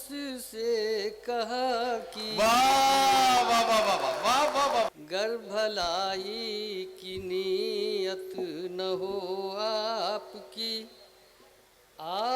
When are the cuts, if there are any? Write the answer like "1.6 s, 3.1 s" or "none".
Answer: 4.9 s